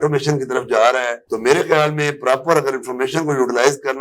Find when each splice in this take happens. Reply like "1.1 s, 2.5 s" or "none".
none